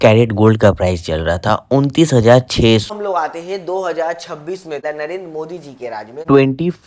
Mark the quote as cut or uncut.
cut